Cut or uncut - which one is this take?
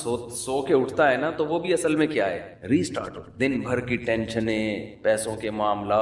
cut